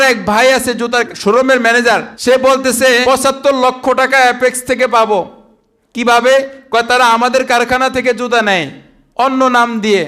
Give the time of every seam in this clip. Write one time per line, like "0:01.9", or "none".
0:01.1
0:02.1
0:03.0

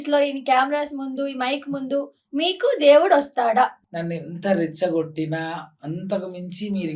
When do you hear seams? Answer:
0:03.8

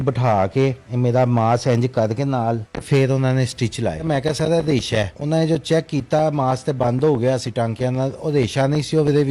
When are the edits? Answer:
0:00.8
0:02.7
0:04.0
0:05.2

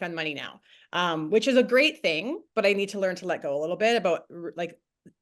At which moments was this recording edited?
none

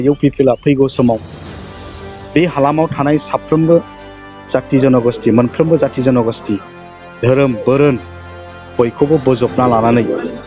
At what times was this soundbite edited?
none

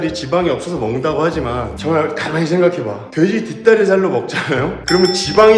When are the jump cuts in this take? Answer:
none

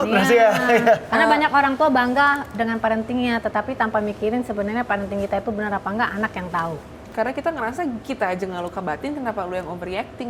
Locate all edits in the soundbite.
0:07.0

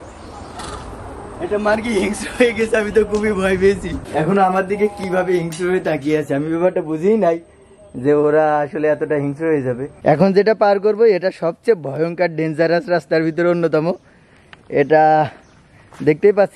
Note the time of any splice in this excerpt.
0:04.0
0:09.9

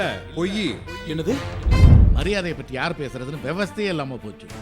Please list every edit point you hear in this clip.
0:01.9

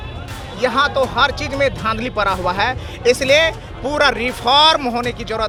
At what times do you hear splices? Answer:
none

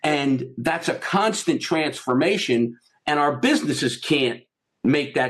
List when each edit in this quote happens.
none

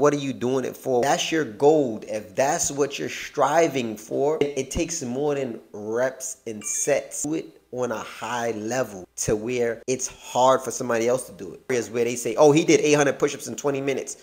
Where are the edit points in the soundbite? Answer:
0:01.0
0:04.4
0:07.2
0:09.1
0:09.8
0:11.7

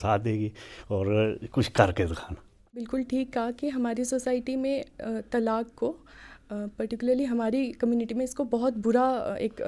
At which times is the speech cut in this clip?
0:02.8

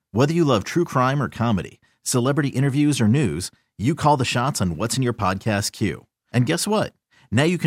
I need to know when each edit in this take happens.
none

